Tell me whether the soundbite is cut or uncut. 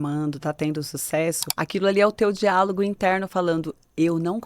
cut